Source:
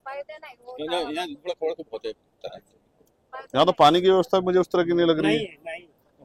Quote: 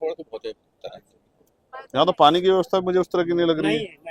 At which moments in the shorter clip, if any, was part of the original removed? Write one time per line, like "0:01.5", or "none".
none